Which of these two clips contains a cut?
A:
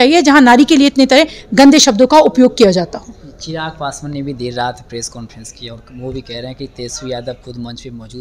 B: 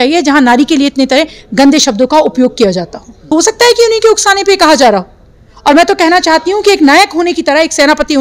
B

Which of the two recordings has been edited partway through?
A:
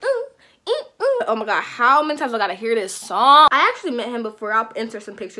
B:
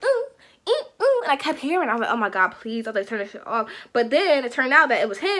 A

